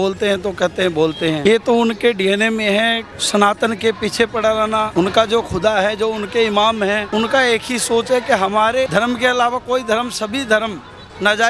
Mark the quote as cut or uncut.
cut